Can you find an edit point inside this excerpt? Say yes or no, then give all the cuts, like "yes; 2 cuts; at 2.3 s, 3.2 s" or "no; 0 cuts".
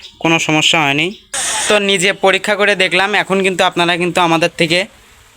yes; 1 cut; at 1.6 s